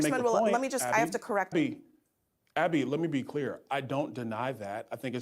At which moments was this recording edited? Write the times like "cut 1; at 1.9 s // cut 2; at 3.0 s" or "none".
cut 1; at 1.5 s